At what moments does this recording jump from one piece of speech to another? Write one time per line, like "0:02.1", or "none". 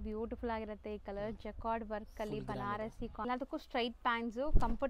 0:03.2